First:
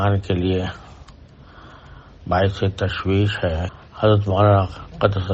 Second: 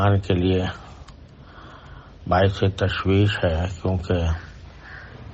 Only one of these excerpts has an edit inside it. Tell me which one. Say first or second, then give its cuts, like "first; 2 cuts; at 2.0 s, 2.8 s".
first; 1 cut; at 3.7 s